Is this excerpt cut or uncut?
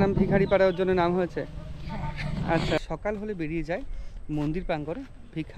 cut